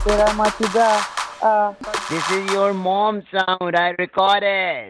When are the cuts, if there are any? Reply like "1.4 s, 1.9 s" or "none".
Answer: 1.9 s